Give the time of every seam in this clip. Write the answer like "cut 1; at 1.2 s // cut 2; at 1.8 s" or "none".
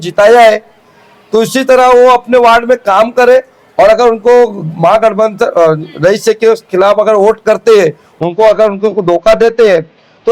none

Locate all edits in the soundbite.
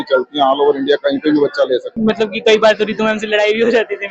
cut 1; at 1.9 s

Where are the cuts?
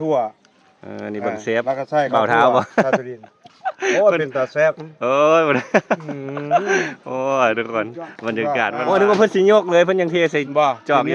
cut 1; at 8.8 s

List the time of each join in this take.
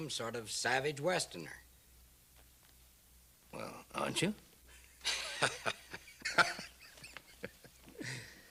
none

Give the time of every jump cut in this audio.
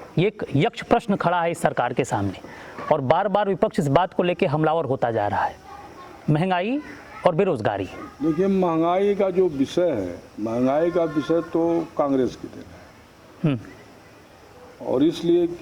none

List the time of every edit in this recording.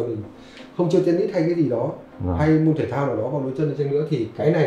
none

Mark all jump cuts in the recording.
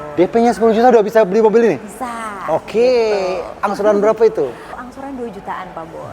cut 1; at 4.7 s

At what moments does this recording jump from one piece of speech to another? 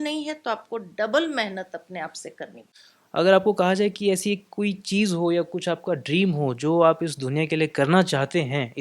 cut 1; at 2.6 s

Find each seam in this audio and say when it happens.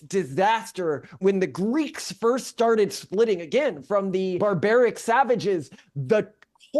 cut 1; at 1.2 s // cut 2; at 4.4 s

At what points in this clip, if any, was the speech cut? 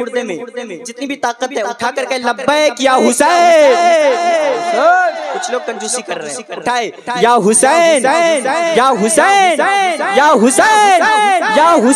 none

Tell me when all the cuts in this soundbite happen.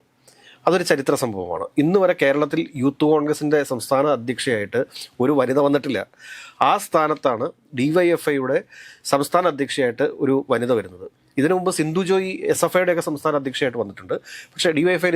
none

